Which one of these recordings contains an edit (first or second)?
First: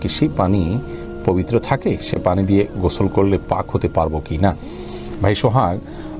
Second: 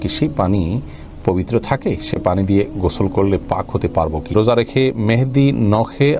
second